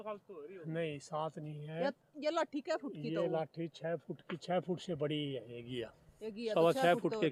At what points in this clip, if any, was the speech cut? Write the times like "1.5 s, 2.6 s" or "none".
none